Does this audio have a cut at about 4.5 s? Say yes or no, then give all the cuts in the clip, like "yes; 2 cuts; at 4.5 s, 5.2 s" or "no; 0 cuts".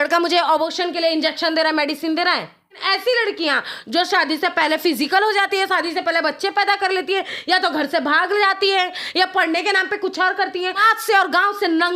no; 2 cuts; at 2.9 s, 10.8 s